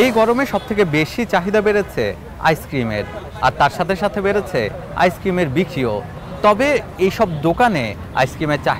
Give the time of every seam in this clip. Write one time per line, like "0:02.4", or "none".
none

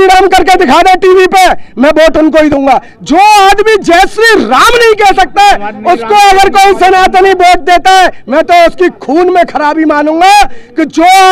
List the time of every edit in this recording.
none

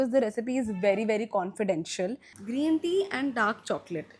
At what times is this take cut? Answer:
0:02.2

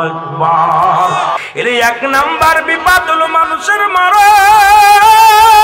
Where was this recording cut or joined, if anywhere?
0:01.3

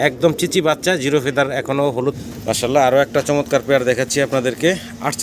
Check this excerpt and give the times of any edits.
0:02.2

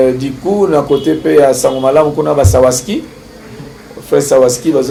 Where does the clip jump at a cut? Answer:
none

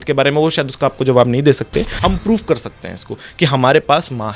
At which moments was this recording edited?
0:01.9

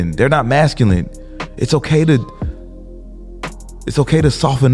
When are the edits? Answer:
none

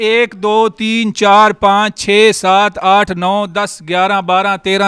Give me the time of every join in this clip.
none

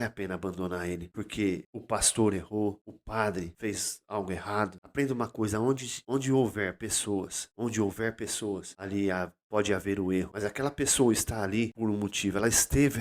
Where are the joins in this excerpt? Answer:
0:01.1
0:01.7
0:03.2
0:04.8
0:05.9
0:07.4
0:08.7
0:10.3
0:11.7

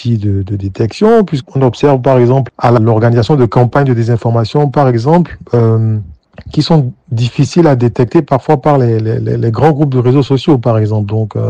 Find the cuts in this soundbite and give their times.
0:01.3
0:02.6

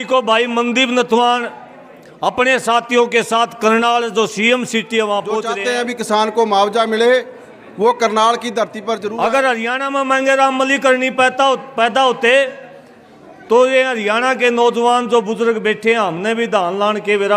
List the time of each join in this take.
0:05.5
0:09.1

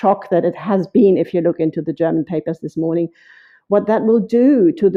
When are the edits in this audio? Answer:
none

